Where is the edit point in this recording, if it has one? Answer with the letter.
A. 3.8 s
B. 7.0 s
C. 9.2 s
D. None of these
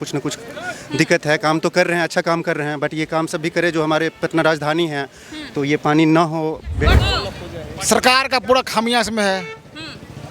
B